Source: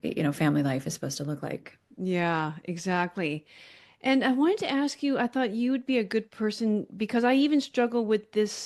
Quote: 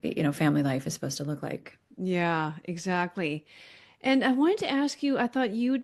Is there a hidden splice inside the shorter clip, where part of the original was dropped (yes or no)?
no